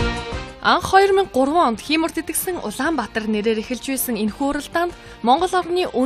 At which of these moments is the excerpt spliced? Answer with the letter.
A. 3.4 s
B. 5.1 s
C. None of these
C